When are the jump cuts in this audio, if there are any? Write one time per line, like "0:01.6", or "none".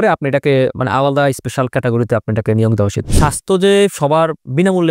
0:03.0